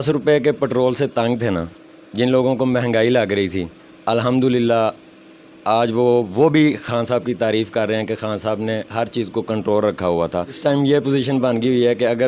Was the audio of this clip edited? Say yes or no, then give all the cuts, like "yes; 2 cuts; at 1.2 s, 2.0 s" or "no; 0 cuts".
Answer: yes; 1 cut; at 10.6 s